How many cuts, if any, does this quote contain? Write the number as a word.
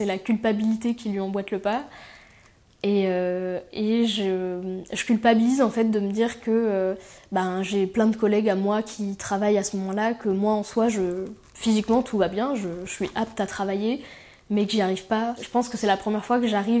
one